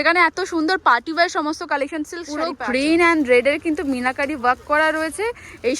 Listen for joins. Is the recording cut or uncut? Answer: cut